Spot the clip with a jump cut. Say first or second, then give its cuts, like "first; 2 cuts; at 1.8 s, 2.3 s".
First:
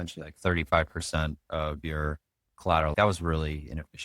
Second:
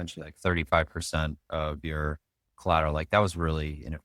first; 1 cut; at 2.9 s